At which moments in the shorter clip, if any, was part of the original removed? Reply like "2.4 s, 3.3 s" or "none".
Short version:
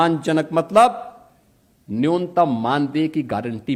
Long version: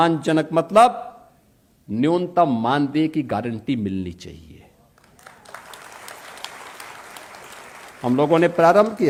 none